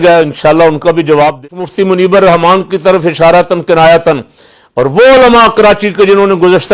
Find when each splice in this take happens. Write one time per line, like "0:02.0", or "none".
0:01.4